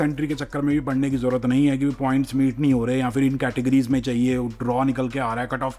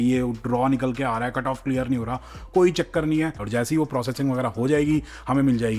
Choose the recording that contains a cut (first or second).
second